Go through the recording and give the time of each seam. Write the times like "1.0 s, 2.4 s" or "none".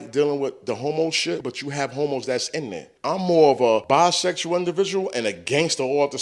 1.4 s, 2.8 s, 3.8 s

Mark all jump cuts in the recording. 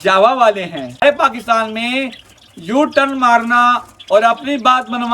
1.0 s

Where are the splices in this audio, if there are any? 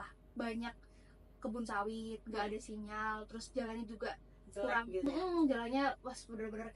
none

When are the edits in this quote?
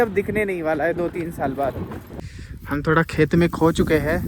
2.1 s

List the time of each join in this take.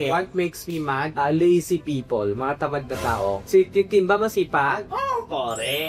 none

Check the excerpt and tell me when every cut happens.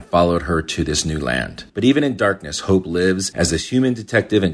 3.3 s

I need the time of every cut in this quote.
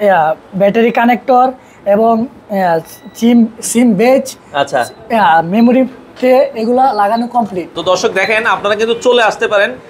7.7 s

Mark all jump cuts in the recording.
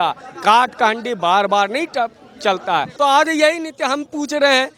2.9 s

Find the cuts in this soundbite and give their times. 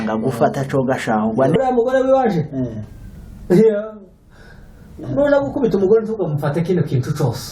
1.6 s

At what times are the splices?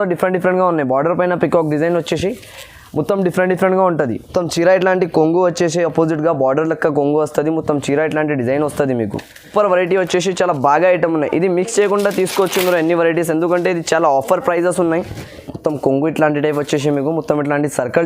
4.2 s, 9.5 s, 15.4 s

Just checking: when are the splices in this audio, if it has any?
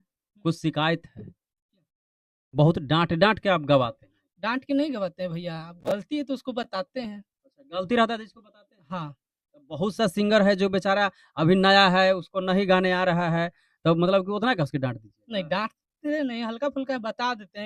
none

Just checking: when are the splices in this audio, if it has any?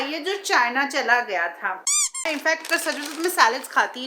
2.2 s

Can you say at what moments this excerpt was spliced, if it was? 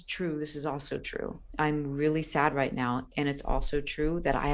1.4 s

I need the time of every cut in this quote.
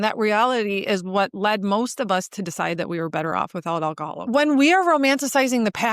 4.3 s

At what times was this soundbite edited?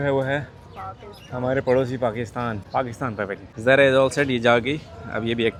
none

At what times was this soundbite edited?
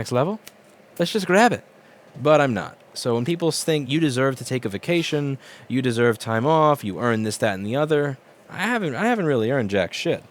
3.9 s

